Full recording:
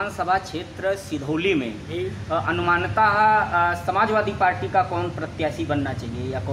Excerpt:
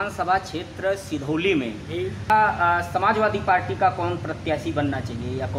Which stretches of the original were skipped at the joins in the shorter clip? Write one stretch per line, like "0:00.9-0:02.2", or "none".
0:02.3-0:03.2